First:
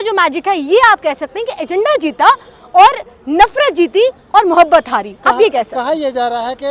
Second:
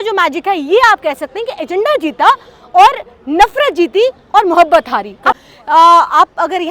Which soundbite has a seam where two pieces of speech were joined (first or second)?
second